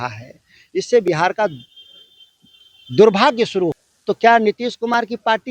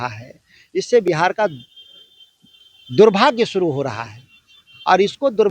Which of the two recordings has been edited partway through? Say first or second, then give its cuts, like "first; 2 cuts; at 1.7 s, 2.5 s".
first; 1 cut; at 3.9 s